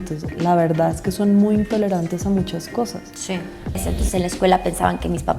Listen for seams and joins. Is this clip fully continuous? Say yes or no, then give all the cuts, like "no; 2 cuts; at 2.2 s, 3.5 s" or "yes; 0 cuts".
no; 1 cut; at 3.8 s